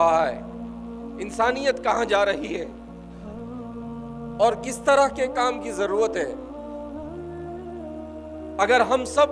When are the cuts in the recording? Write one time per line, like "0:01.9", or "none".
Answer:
0:02.7
0:04.1
0:06.4
0:08.6